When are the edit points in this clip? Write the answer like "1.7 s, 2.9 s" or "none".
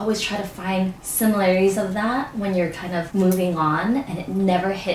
1.0 s, 3.1 s